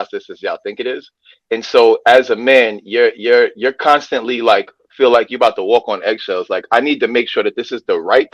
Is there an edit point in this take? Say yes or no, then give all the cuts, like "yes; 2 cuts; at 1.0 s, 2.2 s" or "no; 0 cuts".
no; 0 cuts